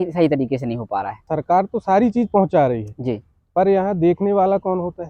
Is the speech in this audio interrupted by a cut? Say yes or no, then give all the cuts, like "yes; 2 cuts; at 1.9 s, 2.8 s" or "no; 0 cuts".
yes; 1 cut; at 1.3 s